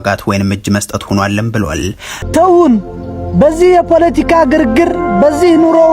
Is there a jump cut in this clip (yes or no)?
yes